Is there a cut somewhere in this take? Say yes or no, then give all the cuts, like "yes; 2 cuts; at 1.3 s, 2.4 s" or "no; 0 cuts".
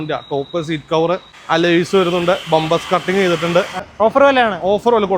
yes; 2 cuts; at 1.3 s, 3.8 s